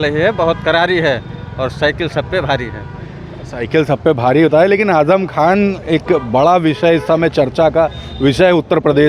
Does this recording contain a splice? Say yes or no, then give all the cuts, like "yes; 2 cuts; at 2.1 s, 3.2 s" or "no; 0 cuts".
no; 0 cuts